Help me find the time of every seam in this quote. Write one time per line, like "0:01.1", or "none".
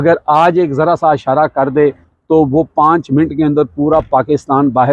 0:02.1

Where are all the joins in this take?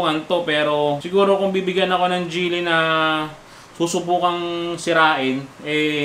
0:01.0

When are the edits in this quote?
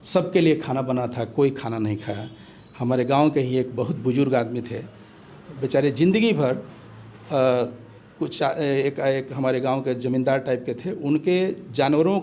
none

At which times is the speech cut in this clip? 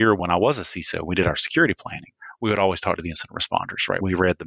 none

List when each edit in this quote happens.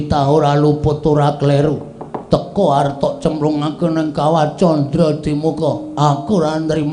none

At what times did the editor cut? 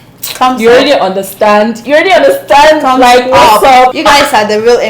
0:03.9

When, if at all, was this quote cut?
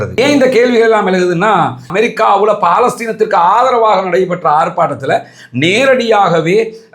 0:01.9

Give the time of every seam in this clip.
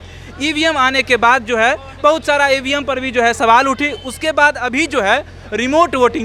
none

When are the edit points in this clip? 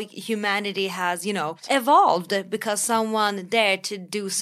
0:01.6

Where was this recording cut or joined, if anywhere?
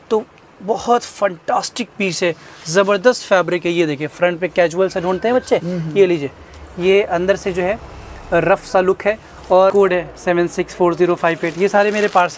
0:09.7

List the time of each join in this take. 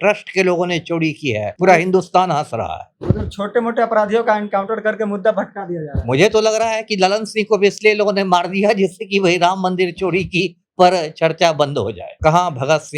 0:01.5
0:12.1

